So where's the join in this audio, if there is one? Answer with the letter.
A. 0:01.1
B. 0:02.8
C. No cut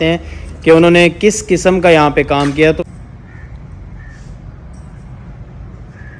B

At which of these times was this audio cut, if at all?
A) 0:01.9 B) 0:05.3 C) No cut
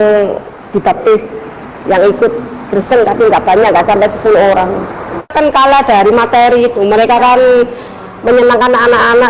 B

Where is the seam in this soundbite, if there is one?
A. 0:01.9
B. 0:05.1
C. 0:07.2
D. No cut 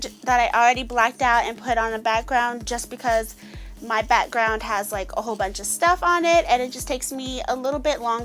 C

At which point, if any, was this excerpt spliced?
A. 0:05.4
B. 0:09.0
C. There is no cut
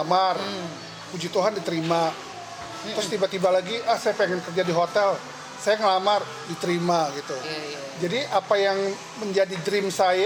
C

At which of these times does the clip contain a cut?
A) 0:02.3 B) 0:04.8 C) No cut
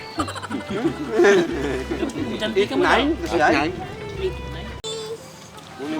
B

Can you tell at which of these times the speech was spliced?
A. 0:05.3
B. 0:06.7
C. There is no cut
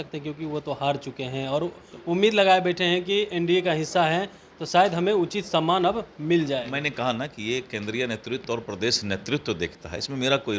C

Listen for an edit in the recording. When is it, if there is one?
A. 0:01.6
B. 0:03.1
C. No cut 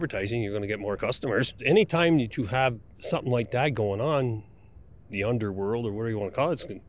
A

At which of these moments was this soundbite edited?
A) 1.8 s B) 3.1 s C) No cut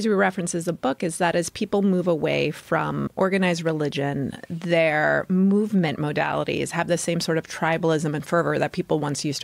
B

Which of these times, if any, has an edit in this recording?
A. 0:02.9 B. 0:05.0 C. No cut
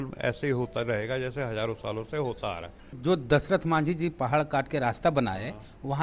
A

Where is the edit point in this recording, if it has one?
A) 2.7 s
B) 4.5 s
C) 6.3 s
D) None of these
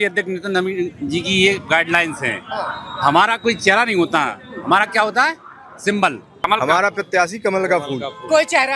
C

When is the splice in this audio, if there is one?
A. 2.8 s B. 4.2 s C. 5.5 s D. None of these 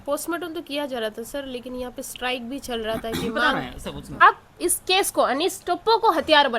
B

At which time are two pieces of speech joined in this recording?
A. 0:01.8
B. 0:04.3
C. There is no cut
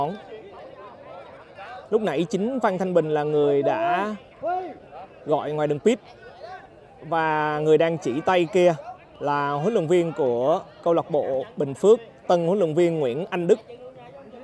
C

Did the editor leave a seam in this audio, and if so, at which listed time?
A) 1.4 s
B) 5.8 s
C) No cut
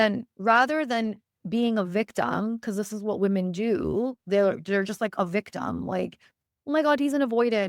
A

